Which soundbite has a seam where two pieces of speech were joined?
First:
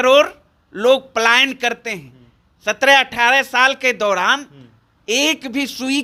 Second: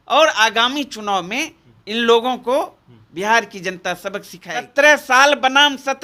second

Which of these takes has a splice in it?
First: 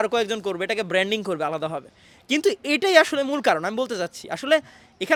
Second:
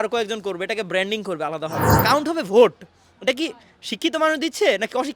second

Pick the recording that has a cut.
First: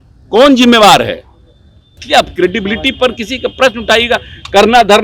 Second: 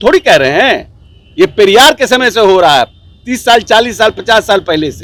first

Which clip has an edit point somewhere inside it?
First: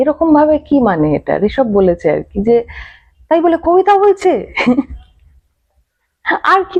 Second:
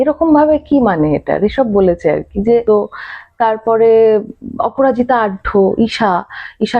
second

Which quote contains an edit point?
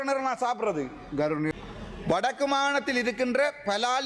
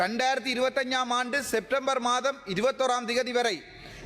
first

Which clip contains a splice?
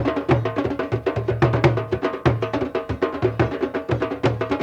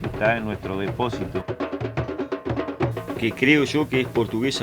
second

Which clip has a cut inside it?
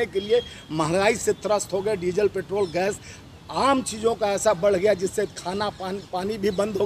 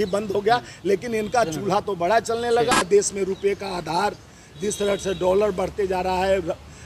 second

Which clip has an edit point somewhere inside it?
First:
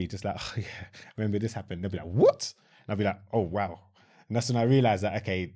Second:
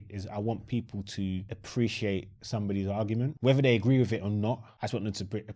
second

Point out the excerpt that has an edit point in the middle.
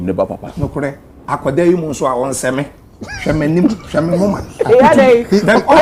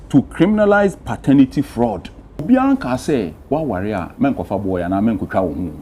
second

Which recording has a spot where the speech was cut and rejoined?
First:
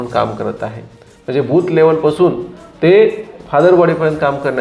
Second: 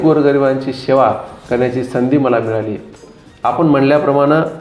second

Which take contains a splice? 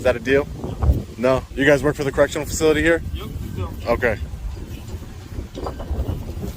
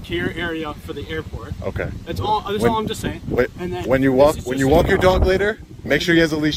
first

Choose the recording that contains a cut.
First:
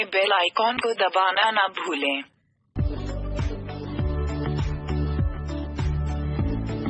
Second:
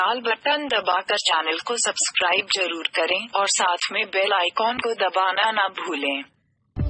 first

